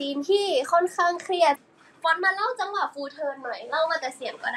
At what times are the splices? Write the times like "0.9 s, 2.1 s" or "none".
1.6 s

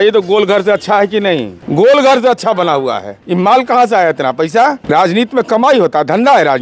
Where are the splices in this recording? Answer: 1.6 s, 3.1 s, 4.8 s

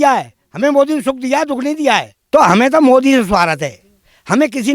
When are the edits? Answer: 2.2 s

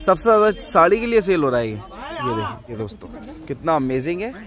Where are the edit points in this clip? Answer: 2.7 s

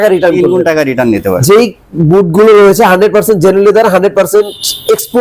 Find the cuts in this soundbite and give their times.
1.4 s

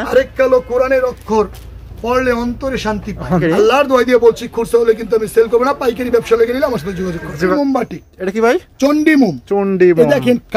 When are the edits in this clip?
3.4 s, 7.5 s

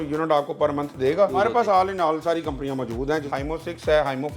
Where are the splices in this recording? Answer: 1.3 s, 3.2 s

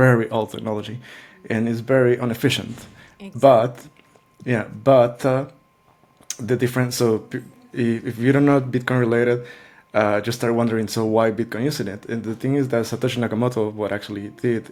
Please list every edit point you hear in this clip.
none

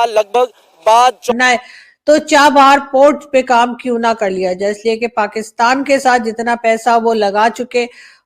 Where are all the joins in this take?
1.3 s

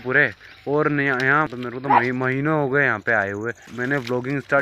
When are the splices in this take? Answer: 1.5 s, 3.7 s

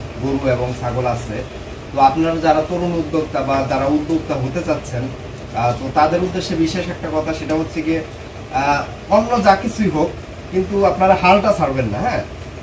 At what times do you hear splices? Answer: none

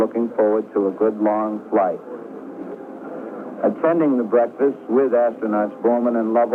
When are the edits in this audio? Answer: none

